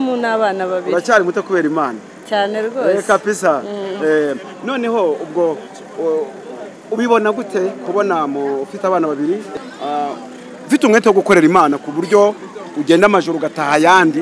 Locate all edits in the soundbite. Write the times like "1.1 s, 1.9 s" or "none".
9.5 s